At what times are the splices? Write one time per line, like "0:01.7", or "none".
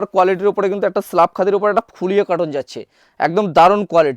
none